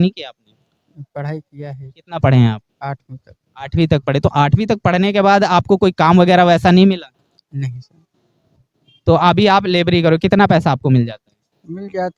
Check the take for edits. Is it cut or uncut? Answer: uncut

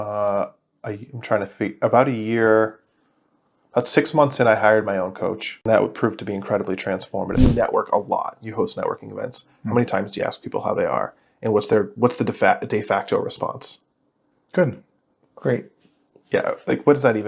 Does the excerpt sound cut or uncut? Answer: cut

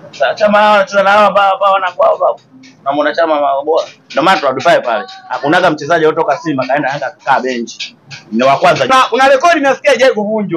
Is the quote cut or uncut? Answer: cut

